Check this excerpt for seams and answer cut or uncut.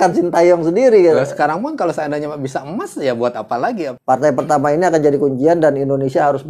cut